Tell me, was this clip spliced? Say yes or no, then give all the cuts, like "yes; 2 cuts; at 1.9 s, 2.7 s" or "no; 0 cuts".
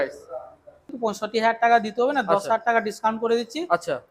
yes; 1 cut; at 0.9 s